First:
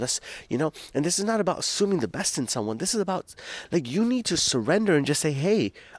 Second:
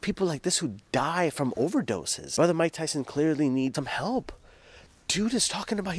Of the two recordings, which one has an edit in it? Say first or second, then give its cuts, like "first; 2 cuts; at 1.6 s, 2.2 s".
second; 2 cuts; at 2.2 s, 3.7 s